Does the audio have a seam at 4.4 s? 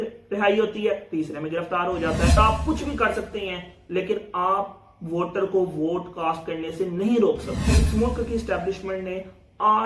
no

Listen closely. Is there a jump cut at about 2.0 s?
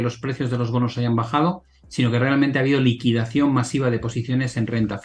no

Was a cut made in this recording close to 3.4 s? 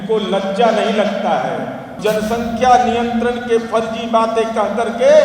no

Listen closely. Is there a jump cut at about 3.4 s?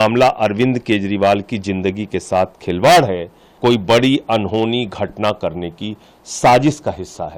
yes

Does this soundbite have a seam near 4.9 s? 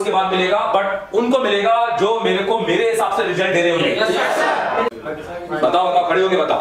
yes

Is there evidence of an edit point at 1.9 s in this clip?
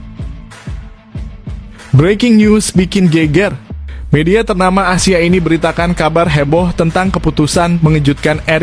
yes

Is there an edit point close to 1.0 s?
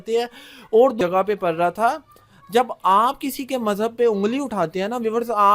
yes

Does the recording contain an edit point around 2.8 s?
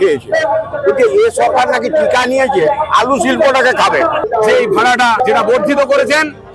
no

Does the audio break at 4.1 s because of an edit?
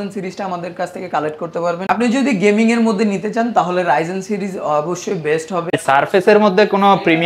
no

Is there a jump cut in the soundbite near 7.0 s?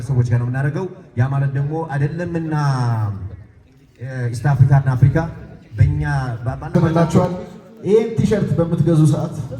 yes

